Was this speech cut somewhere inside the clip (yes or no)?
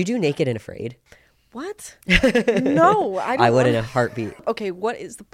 yes